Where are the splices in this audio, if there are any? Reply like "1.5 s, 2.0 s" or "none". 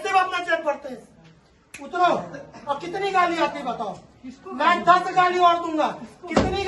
none